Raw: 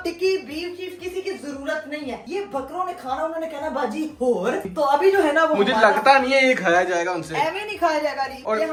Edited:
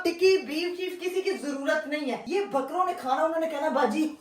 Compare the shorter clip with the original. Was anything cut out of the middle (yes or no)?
no